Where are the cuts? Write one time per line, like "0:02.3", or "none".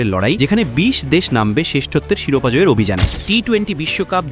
0:03.1